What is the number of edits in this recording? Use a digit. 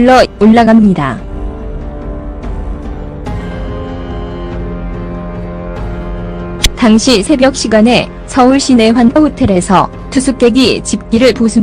1